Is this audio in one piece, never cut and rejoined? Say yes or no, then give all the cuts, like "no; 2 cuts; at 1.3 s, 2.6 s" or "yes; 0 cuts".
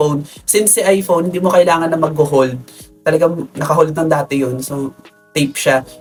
yes; 0 cuts